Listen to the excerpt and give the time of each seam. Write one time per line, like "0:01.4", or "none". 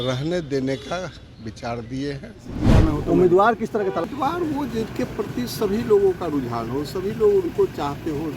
0:02.7